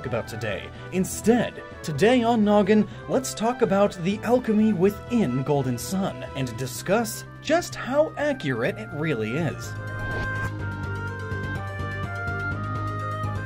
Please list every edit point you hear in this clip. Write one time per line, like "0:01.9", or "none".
0:03.0